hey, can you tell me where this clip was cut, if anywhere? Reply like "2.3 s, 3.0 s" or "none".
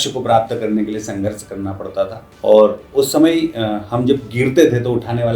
2.2 s